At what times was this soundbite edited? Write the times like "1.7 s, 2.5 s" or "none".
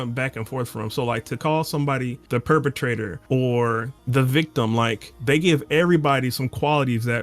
2.2 s, 3.1 s, 3.9 s, 5.1 s